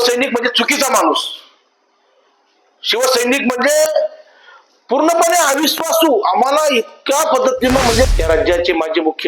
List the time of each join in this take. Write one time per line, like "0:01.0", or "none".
0:08.1